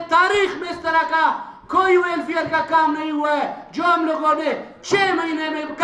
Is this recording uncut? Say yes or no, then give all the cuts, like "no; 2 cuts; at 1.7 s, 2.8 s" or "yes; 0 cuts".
yes; 0 cuts